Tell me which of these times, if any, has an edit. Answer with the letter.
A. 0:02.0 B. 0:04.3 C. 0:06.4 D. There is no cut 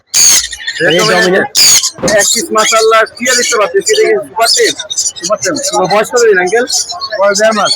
A